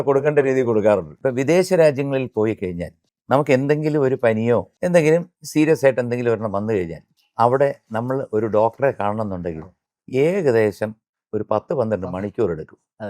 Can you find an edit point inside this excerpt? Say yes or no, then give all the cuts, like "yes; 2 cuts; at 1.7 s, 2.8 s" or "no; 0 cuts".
yes; 3 cuts; at 1.1 s, 4.7 s, 5.4 s